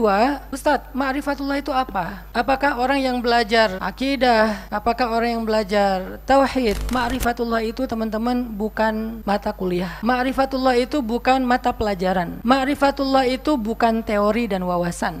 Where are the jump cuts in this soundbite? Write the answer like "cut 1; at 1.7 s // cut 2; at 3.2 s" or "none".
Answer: cut 1; at 6.8 s